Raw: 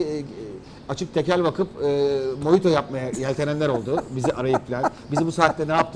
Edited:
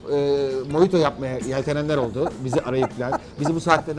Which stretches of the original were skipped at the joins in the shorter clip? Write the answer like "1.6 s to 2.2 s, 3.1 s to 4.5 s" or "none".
none